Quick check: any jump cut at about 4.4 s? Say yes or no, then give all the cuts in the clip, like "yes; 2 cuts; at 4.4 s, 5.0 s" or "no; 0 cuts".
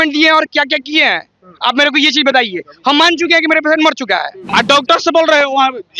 yes; 1 cut; at 4.4 s